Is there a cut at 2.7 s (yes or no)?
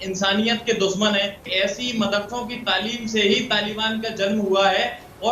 no